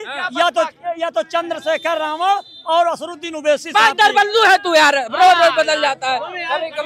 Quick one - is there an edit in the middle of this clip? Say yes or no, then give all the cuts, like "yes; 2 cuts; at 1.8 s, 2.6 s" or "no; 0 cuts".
no; 0 cuts